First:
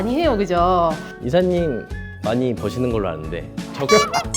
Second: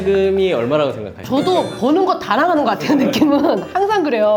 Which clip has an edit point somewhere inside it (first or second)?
first